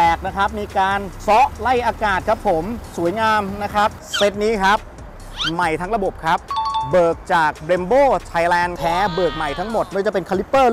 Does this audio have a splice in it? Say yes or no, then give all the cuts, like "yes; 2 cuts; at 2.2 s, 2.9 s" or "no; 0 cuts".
yes; 2 cuts; at 4.0 s, 8.7 s